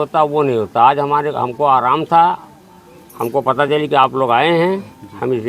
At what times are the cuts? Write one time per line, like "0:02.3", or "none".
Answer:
none